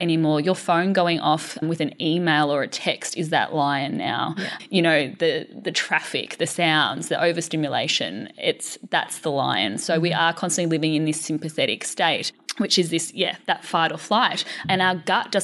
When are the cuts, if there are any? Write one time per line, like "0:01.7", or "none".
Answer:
0:01.6
0:04.5
0:12.4
0:14.6